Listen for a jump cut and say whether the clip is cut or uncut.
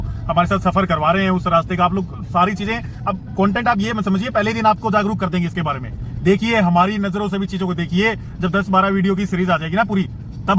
uncut